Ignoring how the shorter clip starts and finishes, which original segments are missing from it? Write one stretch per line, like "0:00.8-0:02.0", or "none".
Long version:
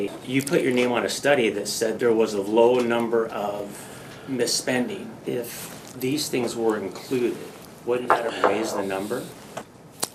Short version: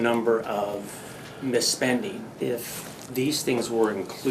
none